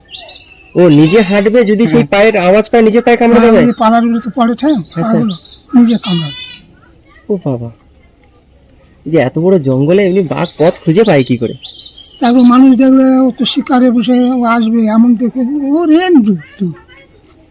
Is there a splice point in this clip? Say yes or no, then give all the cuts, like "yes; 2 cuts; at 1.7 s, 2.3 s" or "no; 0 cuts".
no; 0 cuts